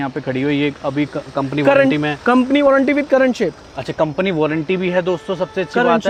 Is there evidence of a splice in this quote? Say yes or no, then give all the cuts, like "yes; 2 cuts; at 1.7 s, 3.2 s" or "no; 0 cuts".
no; 0 cuts